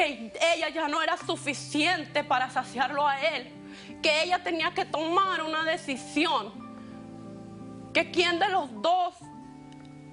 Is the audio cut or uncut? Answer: uncut